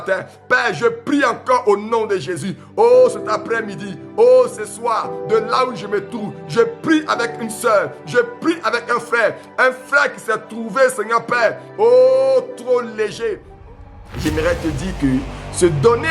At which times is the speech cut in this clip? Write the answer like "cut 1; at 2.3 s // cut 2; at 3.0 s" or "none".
cut 1; at 13.5 s